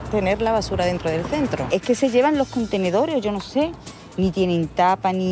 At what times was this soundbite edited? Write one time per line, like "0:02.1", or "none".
0:01.6